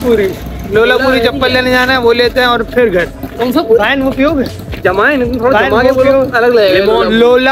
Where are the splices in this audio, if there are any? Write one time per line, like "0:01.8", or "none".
none